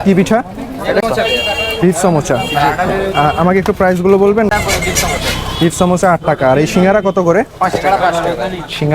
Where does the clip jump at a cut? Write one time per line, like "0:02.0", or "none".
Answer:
0:01.0
0:04.5